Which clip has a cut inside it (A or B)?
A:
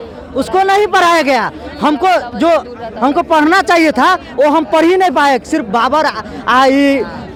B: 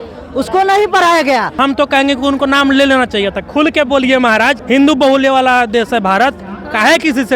B